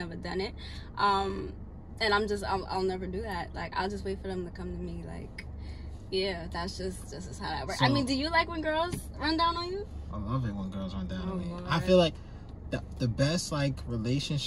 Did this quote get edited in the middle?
no; 0 cuts

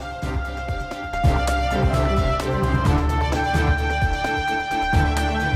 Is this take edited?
no; 0 cuts

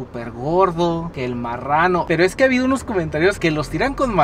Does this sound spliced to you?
no; 0 cuts

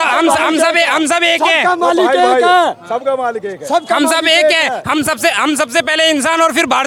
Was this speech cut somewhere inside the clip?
no; 0 cuts

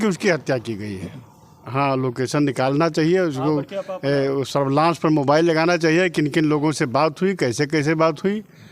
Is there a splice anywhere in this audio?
no; 0 cuts

